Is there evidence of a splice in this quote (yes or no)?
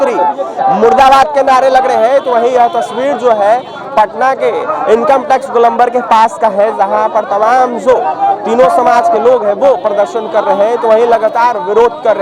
no